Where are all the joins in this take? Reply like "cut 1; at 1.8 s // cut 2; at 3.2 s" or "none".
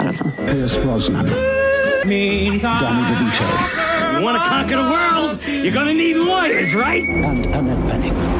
none

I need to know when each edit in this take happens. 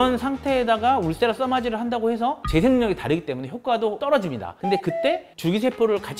cut 1; at 2.4 s

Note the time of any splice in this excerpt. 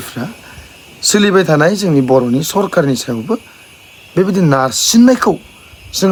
none

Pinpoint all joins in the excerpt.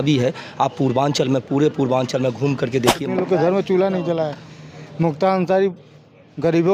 cut 1; at 3.0 s

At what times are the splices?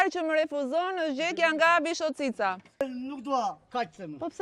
cut 1; at 2.8 s

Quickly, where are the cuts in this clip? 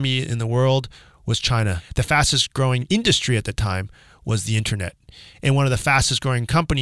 cut 1; at 1.8 s // cut 2; at 2.8 s

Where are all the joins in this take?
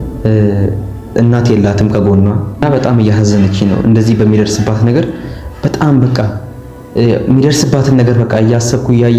cut 1; at 2.6 s

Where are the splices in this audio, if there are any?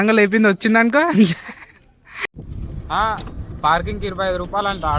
cut 1; at 2.3 s

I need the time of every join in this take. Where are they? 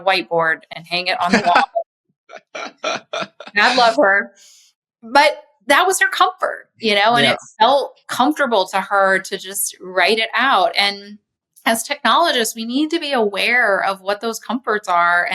cut 1; at 5.5 s

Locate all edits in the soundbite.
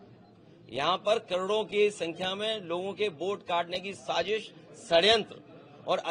none

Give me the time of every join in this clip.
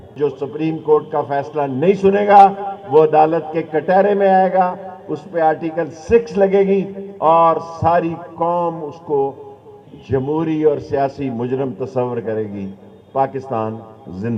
none

